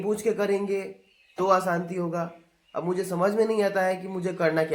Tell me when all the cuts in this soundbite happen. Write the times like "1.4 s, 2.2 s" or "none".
none